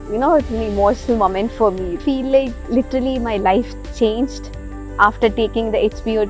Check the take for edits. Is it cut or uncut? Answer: cut